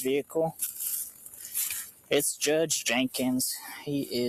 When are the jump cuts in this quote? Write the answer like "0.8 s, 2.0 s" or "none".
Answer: none